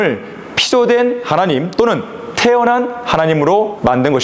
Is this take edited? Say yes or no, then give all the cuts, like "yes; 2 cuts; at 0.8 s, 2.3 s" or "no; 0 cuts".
no; 0 cuts